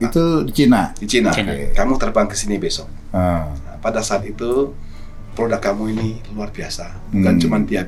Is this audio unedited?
yes; 0 cuts

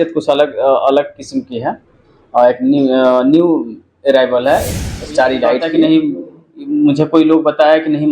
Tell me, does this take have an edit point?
yes; 1 cut; at 5.7 s

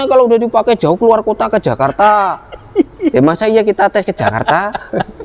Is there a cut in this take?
no; 0 cuts

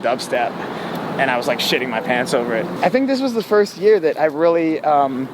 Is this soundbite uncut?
no; 1 cut; at 2.7 s

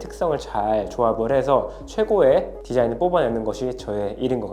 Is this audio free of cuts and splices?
yes; 0 cuts

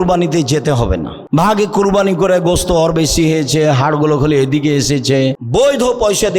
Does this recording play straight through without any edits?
no; 2 cuts; at 1.1 s, 5.4 s

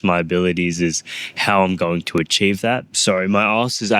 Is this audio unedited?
no; 1 cut; at 3.0 s

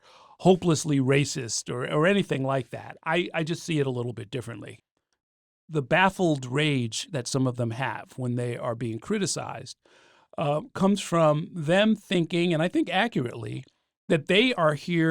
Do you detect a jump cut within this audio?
yes; 1 cut; at 4.8 s

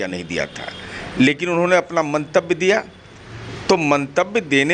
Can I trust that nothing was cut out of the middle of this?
yes; 0 cuts

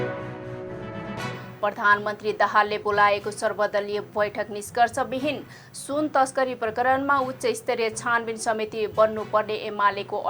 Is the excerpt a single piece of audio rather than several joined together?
no; 1 cut; at 1.5 s

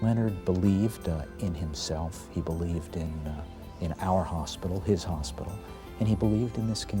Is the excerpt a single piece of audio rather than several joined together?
yes; 0 cuts

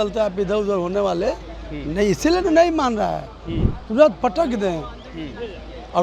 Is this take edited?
no; 0 cuts

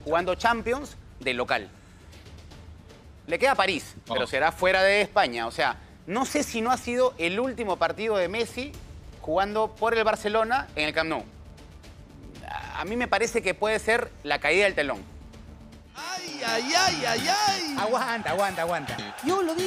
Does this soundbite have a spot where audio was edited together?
yes; 1 cut; at 16.0 s

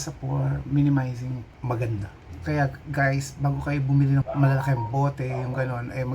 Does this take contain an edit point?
yes; 1 cut; at 2.2 s

